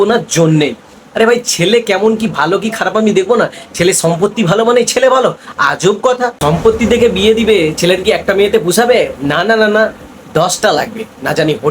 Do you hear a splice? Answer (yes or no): yes